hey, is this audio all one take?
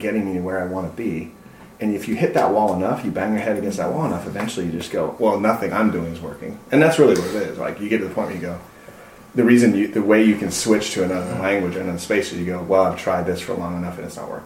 no; 1 cut; at 5.1 s

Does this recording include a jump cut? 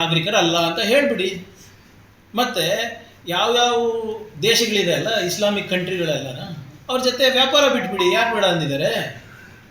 no; 0 cuts

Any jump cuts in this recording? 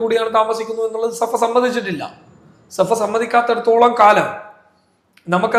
no; 0 cuts

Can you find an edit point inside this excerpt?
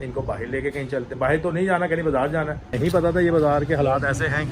yes; 1 cut; at 2.7 s

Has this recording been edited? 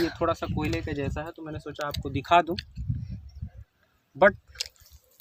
no; 0 cuts

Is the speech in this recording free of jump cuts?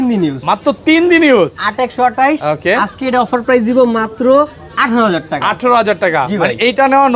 yes; 0 cuts

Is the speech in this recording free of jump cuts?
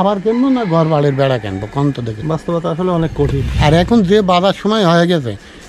no; 2 cuts; at 2.1 s, 3.5 s

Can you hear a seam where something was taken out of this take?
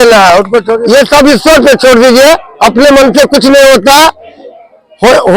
yes; 1 cut; at 0.9 s

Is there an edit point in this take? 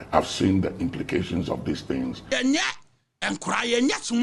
yes; 1 cut; at 2.3 s

